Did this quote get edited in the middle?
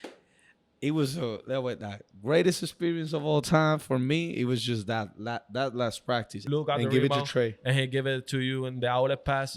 yes; 1 cut; at 6.4 s

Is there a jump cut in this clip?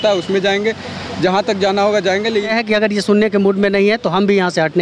yes; 1 cut; at 2.5 s

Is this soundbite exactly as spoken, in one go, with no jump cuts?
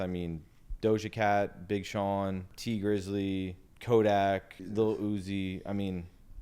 no; 3 cuts; at 2.5 s, 3.7 s, 4.6 s

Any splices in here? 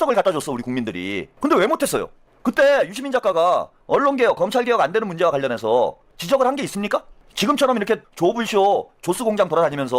yes; 5 cuts; at 1.2 s, 3.7 s, 6.1 s, 7.2 s, 8.1 s

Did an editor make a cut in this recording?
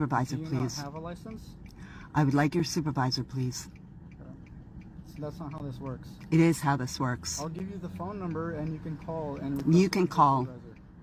no; 0 cuts

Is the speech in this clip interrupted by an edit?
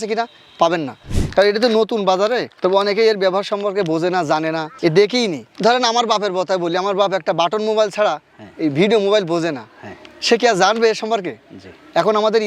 yes; 1 cut; at 1.1 s

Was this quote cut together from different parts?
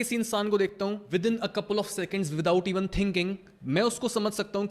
yes; 2 cuts; at 1.0 s, 3.5 s

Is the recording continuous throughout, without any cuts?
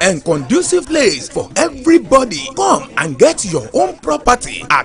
yes; 0 cuts

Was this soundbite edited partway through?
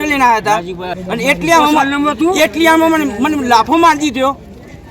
yes; 1 cut; at 0.9 s

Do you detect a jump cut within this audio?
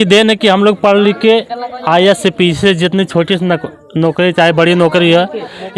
no; 0 cuts

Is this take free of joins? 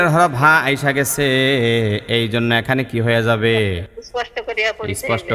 no; 1 cut; at 3.9 s

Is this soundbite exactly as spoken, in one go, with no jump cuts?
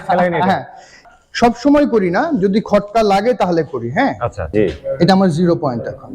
no; 2 cuts; at 0.9 s, 4.3 s

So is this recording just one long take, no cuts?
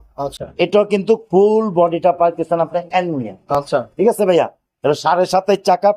yes; 0 cuts

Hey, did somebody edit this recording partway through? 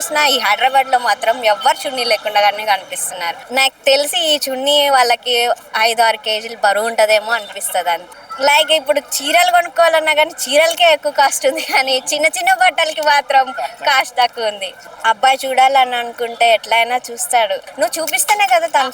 yes; 4 cuts; at 3.4 s, 8.2 s, 14.7 s, 17.6 s

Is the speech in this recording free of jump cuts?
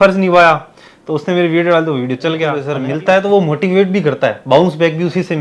no; 1 cut; at 2.7 s

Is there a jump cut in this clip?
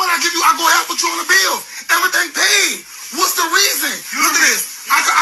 yes; 1 cut; at 2.2 s

